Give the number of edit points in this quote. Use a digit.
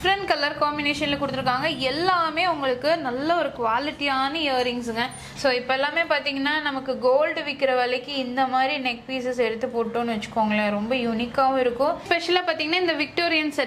2